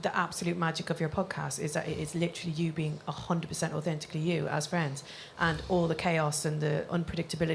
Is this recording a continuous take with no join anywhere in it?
yes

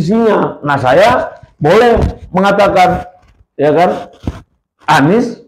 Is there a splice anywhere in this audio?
no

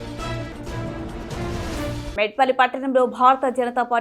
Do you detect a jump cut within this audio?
yes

